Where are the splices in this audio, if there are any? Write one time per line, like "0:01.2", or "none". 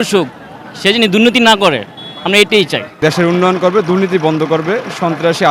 0:03.0